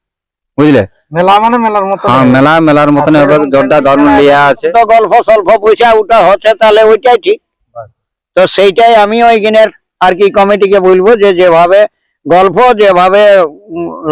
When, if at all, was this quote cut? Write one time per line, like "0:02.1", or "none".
0:04.7